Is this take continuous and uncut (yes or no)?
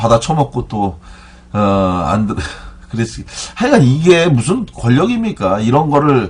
yes